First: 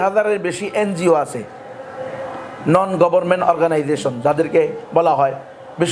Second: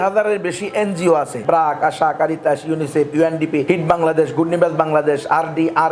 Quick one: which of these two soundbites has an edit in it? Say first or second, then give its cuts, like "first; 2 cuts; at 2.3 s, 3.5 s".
second; 2 cuts; at 1.4 s, 3.6 s